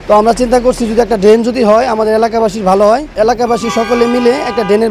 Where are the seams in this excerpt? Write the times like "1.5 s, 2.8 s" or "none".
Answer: 3.1 s